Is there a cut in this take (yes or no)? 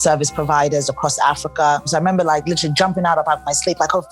yes